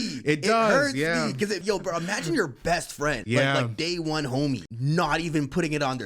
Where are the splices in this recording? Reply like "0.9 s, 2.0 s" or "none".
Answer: 1.6 s, 3.2 s, 4.7 s